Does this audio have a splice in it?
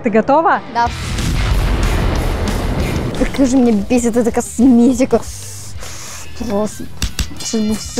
yes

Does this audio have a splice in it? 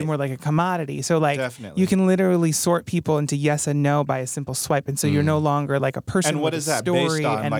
no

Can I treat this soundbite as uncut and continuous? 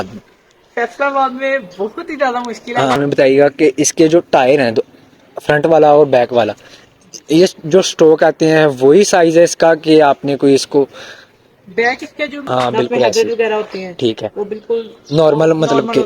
no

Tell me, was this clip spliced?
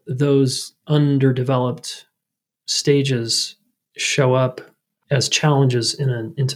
no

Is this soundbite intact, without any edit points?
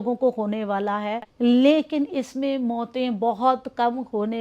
no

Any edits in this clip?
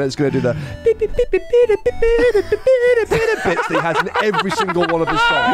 no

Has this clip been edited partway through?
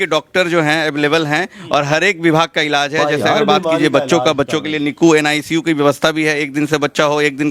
no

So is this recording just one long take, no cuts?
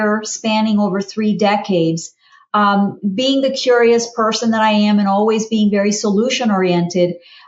yes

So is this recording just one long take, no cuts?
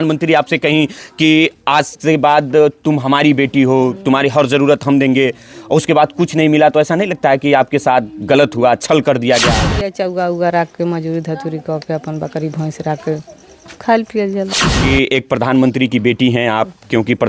no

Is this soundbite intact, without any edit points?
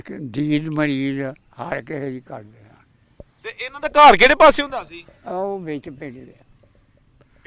yes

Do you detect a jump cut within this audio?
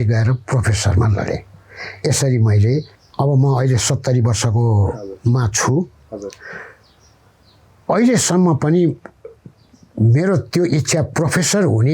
yes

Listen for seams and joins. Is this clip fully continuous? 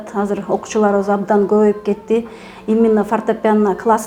yes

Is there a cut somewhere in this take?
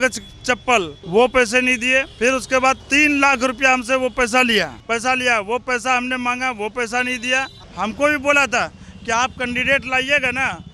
yes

